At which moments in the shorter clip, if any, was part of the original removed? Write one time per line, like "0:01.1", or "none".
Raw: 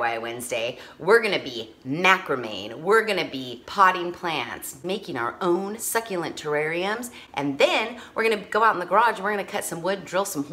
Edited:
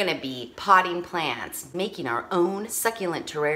none

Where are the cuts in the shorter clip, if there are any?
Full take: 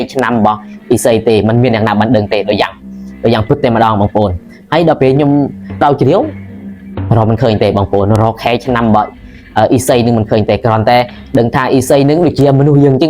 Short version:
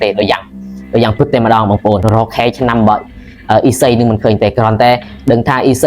0:02.0

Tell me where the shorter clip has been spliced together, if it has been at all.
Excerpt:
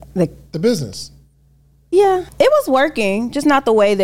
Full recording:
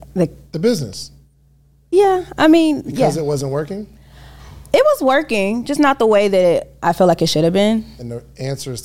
0:02.3

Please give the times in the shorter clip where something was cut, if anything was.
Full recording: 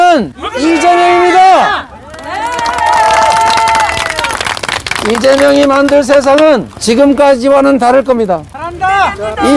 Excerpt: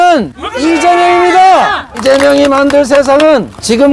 0:01.9

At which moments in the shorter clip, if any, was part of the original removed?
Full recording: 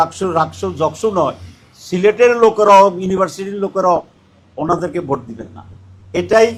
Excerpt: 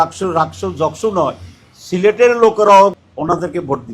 0:03.0

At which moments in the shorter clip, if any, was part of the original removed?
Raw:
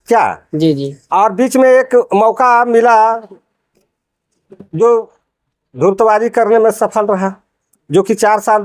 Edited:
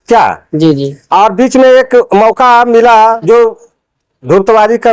0:03.2

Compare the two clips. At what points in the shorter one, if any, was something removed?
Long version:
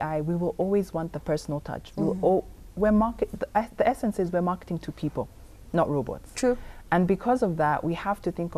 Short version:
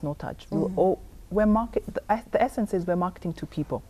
none

